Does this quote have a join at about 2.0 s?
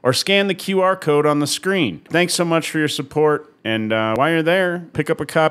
yes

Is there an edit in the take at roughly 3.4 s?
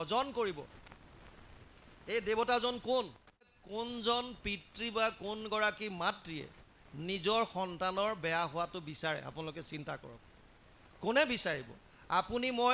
yes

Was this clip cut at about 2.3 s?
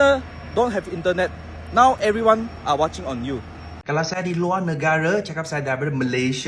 no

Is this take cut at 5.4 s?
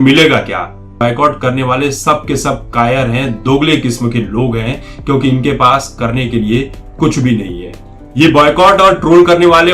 no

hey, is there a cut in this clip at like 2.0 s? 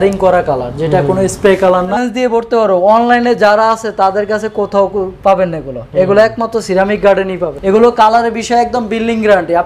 yes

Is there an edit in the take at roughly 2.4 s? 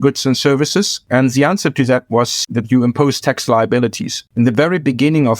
yes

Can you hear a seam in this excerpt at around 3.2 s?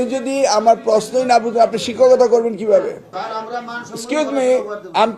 yes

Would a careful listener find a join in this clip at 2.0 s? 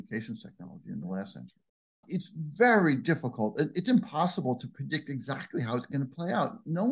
yes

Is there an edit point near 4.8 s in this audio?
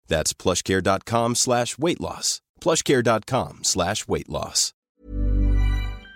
yes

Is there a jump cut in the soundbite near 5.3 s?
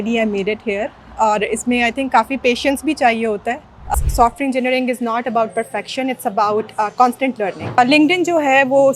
no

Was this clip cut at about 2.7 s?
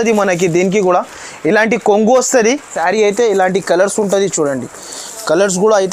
yes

